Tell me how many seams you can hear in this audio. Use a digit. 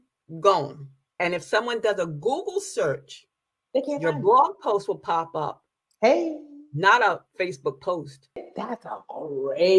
2